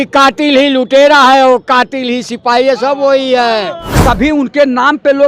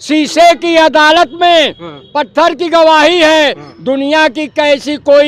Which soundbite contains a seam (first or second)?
first